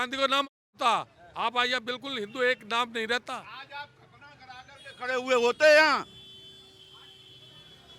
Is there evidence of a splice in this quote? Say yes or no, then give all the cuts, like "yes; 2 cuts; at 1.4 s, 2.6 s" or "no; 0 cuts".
no; 0 cuts